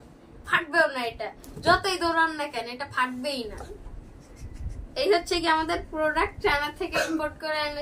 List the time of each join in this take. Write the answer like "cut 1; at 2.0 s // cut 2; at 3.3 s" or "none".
none

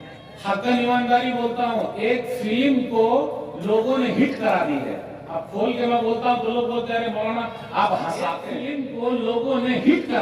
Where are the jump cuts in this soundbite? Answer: cut 1; at 8.5 s

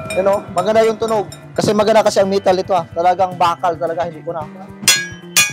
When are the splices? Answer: cut 1; at 1.4 s

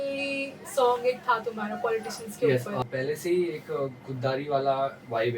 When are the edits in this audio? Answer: cut 1; at 2.8 s

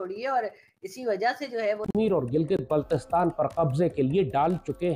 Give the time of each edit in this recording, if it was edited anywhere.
cut 1; at 1.8 s

